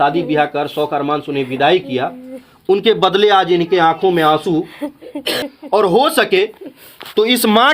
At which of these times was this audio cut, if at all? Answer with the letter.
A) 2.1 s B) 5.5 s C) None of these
B